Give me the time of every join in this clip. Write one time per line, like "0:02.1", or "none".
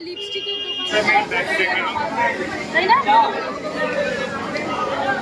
0:00.9